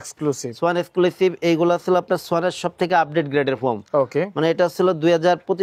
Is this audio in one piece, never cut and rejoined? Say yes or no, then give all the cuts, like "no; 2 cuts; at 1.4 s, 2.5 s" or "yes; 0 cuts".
yes; 0 cuts